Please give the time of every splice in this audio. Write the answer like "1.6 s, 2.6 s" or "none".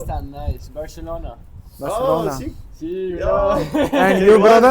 none